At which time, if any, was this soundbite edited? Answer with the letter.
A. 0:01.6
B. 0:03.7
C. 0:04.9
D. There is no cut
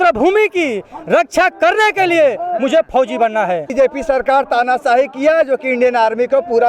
B